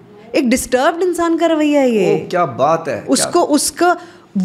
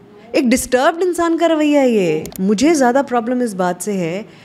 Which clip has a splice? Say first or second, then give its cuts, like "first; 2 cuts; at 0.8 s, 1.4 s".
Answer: second; 1 cut; at 2.2 s